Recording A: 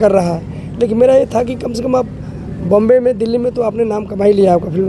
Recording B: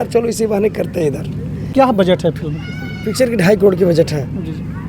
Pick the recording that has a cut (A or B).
B